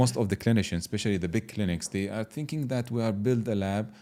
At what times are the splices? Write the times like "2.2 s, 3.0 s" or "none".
none

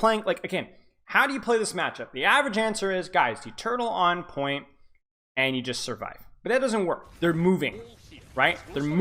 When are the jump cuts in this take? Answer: 7.1 s

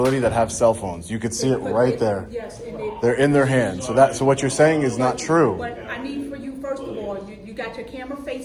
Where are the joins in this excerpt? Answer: none

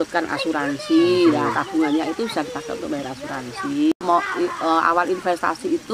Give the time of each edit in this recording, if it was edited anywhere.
3.9 s

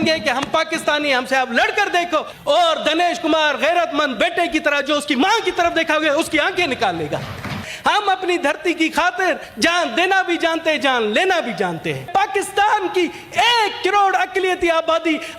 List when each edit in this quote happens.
2.3 s, 7.7 s, 9.5 s, 12.1 s

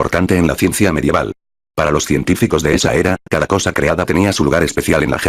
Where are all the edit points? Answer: none

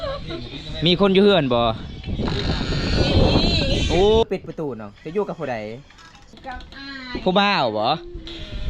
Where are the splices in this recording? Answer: 4.2 s, 6.4 s

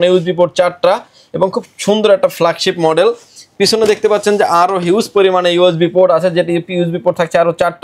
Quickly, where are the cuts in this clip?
none

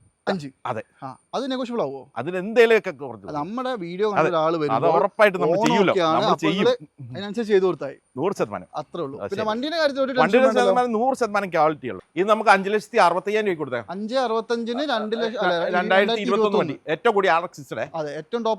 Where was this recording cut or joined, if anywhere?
12.0 s

